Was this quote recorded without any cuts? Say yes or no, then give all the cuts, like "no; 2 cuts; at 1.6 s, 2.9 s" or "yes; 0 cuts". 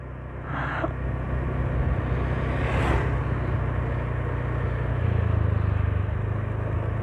yes; 0 cuts